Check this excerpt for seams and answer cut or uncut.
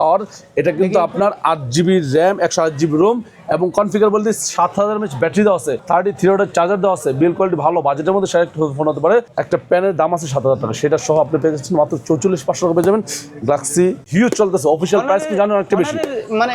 cut